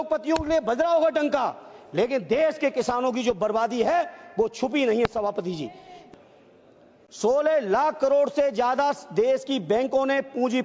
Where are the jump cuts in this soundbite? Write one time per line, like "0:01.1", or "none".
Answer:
0:05.9